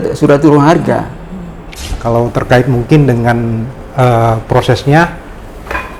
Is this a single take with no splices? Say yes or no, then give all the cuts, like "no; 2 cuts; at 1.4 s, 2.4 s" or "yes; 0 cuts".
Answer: no; 1 cut; at 1.7 s